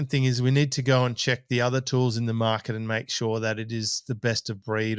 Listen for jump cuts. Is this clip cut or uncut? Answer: uncut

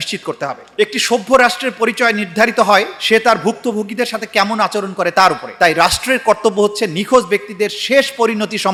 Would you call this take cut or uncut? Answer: uncut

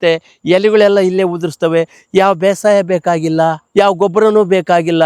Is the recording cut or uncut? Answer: uncut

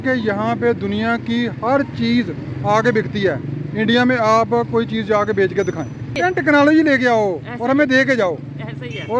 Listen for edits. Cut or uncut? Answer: cut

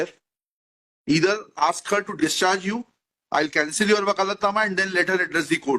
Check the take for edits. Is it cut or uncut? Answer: uncut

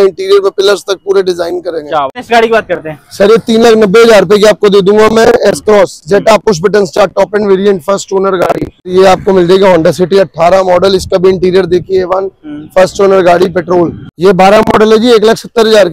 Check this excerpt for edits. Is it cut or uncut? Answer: cut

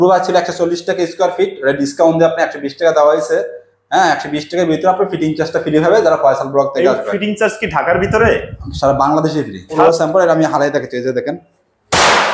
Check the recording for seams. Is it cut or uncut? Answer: cut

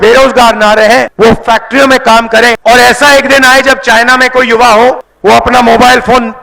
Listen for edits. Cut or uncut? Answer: cut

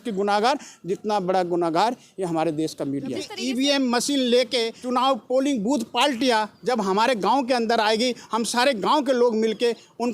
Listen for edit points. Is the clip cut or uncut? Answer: cut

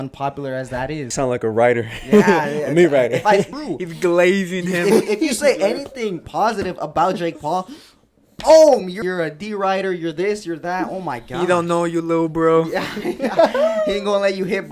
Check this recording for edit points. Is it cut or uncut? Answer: cut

